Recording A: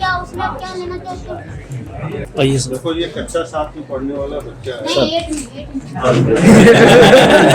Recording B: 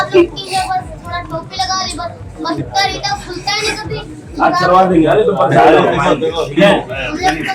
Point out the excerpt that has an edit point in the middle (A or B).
A